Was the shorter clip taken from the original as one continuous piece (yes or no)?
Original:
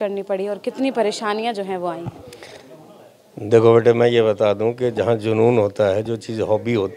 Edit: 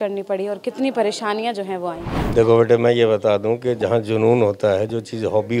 no